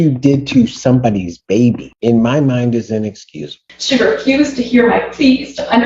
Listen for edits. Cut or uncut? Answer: cut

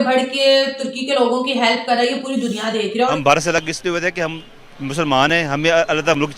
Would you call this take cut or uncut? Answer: cut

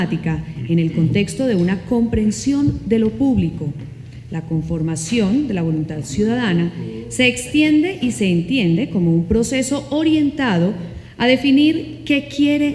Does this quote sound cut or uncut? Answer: cut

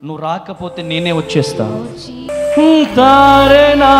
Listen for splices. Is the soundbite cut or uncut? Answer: cut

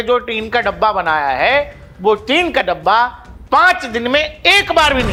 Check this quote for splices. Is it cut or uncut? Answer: uncut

